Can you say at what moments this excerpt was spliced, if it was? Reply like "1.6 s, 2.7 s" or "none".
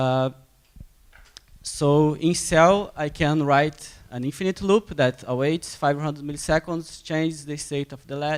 none